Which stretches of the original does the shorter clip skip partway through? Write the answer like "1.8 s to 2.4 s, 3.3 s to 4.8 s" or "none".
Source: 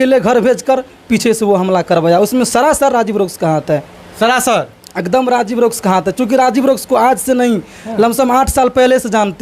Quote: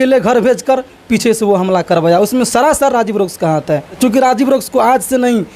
3.9 s to 6.1 s